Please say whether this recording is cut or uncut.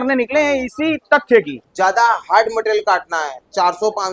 cut